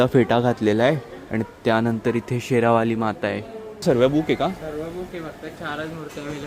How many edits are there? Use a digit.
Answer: 1